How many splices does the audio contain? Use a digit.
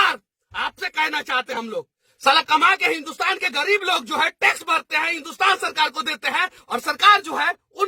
1